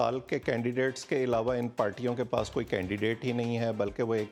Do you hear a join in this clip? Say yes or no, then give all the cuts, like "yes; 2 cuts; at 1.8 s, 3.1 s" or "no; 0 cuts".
no; 0 cuts